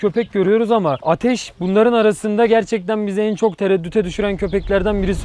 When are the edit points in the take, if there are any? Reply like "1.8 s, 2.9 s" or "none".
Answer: none